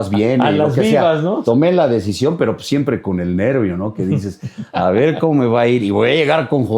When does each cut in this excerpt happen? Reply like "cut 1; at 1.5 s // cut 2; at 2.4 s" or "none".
cut 1; at 1.4 s